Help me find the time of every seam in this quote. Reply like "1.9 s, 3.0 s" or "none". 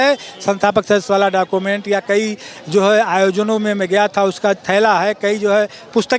none